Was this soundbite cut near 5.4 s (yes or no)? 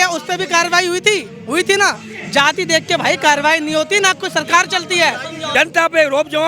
yes